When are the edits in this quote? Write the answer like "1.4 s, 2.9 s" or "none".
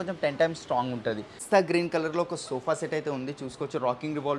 1.3 s